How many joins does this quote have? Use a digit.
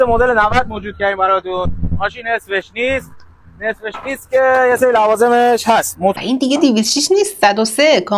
1